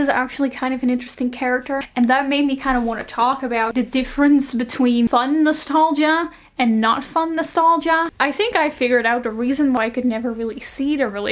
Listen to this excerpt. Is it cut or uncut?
cut